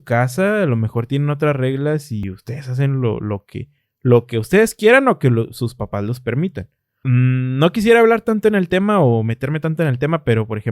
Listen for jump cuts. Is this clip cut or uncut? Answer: cut